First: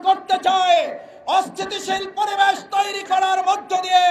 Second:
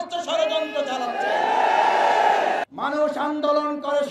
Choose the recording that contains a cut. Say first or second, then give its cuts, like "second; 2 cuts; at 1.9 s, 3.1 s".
second; 1 cut; at 2.6 s